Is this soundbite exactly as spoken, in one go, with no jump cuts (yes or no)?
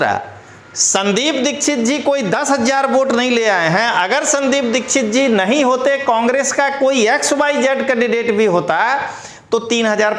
yes